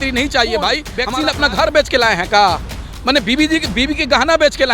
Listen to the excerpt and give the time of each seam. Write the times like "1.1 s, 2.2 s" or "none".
0.9 s